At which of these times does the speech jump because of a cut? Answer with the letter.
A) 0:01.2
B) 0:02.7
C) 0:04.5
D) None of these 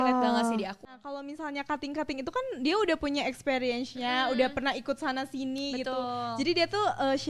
A